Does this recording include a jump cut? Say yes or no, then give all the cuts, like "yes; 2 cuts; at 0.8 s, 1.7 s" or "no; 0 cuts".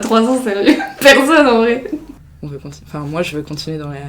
yes; 1 cut; at 2.2 s